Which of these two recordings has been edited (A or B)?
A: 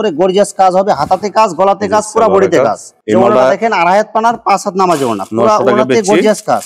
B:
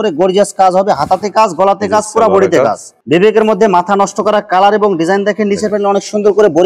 B